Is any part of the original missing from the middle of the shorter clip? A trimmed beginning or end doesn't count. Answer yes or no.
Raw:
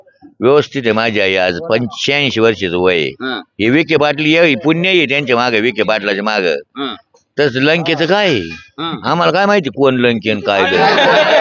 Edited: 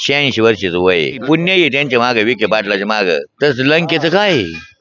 yes